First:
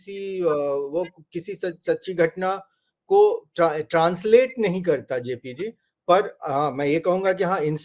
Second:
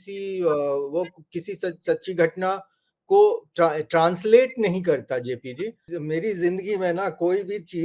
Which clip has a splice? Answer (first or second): second